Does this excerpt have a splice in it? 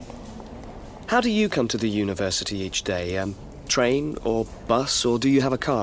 yes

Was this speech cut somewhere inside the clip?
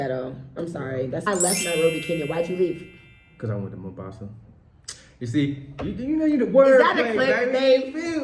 yes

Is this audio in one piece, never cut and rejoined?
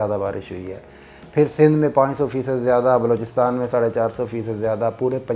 yes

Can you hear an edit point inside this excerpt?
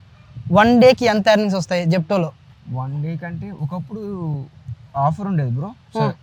no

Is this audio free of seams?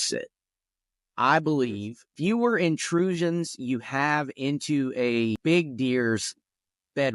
no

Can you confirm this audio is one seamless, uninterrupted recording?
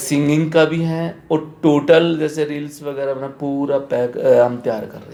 yes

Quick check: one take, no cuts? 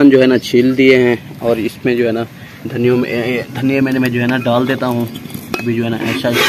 yes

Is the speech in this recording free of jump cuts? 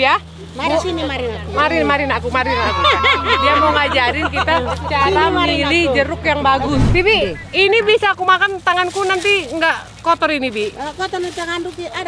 no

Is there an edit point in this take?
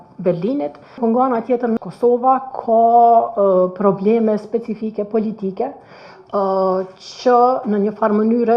yes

